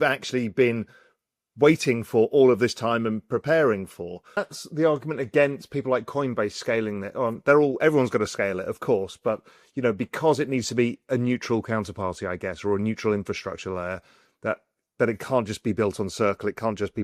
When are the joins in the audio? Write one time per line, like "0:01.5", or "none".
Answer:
0:04.6